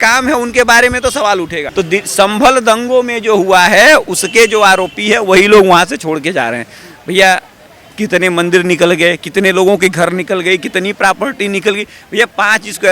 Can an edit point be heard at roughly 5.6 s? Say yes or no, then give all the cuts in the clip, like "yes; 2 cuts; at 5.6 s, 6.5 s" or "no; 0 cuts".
no; 1 cut; at 1.6 s